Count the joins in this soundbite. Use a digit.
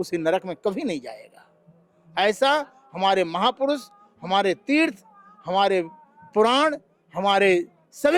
0